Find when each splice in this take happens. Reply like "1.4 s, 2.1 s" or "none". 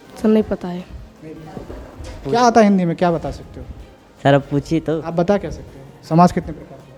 1.7 s